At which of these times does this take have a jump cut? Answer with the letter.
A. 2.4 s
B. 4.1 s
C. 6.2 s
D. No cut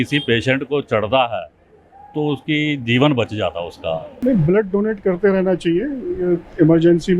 B